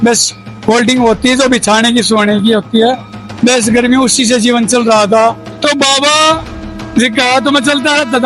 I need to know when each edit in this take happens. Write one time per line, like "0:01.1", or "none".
0:05.5